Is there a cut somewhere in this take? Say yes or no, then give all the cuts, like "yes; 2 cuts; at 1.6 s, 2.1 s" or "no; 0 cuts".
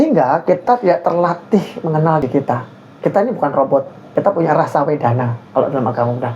yes; 2 cuts; at 2.2 s, 4.0 s